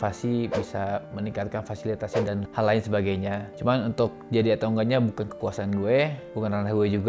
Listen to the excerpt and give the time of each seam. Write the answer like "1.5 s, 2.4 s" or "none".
none